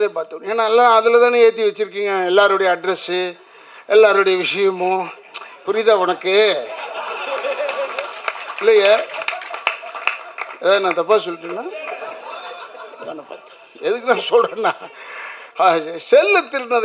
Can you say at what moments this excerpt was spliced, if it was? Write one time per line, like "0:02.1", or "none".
none

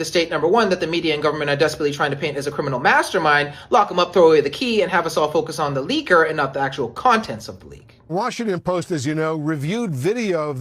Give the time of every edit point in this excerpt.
0:08.0

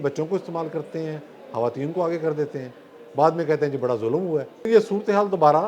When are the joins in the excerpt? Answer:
0:04.7

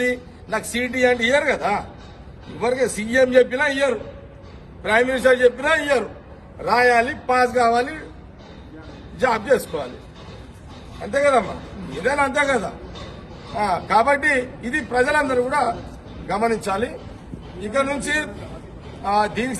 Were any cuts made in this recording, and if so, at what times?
none

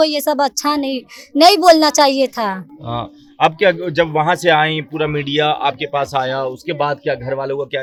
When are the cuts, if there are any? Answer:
none

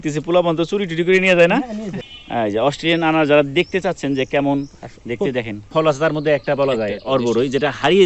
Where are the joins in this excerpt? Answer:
0:01.9
0:05.7

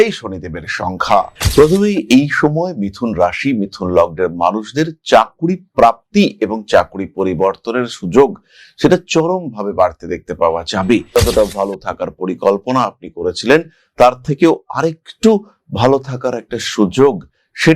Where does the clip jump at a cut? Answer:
0:01.3
0:11.1

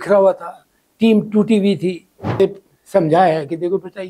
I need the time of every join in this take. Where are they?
0:02.4

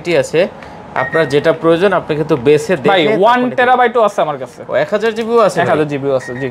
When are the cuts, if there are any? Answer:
none

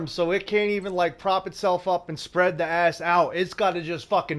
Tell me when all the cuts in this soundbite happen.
none

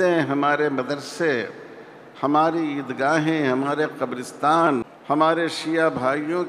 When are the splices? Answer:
0:04.9

